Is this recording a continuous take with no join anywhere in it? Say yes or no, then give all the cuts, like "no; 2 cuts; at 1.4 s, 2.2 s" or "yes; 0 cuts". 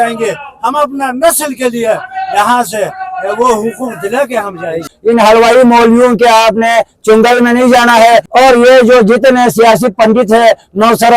no; 2 cuts; at 4.9 s, 8.3 s